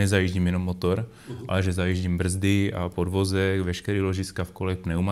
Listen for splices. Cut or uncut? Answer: uncut